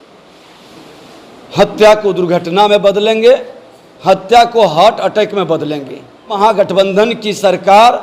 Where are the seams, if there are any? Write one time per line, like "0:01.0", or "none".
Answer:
0:06.4